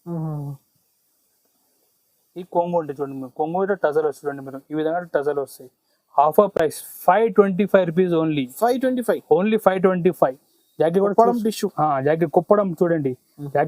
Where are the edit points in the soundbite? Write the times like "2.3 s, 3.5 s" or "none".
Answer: none

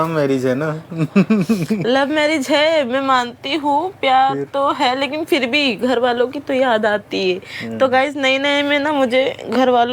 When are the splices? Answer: none

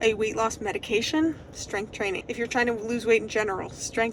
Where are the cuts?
2.2 s

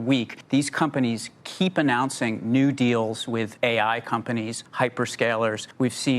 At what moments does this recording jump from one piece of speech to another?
3.5 s, 4.6 s

